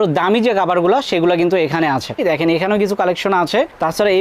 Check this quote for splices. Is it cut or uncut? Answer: cut